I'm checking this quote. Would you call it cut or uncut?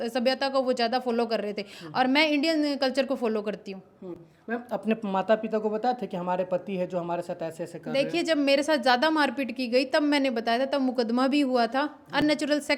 uncut